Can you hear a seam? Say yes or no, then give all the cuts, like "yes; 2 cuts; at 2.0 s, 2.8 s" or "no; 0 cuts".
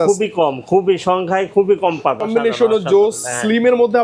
yes; 1 cut; at 2.2 s